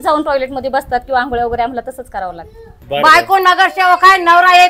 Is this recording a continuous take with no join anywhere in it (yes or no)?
no